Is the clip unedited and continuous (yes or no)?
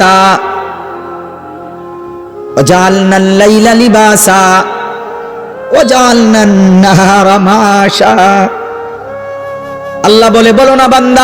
yes